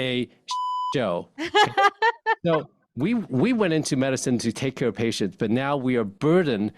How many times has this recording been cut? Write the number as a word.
one